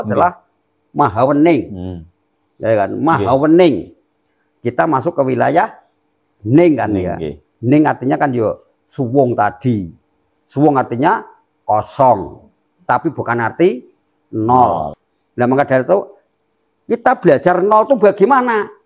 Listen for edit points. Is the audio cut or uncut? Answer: cut